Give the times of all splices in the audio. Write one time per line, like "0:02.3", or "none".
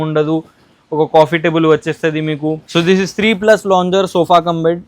0:02.6